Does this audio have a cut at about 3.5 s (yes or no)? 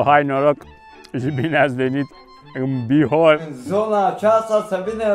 yes